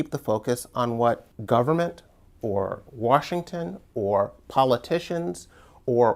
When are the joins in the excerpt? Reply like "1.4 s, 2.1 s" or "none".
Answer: 1.3 s

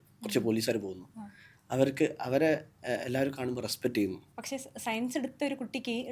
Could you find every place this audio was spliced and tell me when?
4.3 s

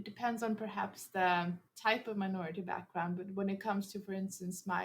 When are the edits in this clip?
1.7 s

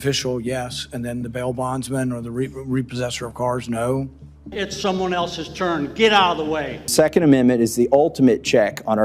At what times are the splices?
4.5 s, 6.7 s

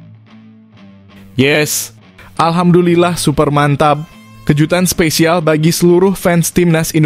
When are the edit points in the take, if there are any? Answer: none

